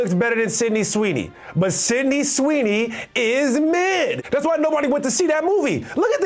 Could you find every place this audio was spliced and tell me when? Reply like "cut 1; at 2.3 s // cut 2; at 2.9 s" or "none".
cut 1; at 4.2 s